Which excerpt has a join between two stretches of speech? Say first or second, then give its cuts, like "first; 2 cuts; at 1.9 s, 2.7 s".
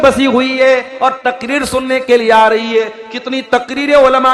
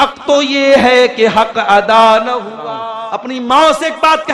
second; 1 cut; at 2.8 s